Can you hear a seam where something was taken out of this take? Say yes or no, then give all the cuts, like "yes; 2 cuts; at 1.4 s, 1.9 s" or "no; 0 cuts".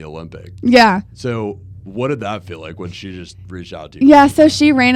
no; 0 cuts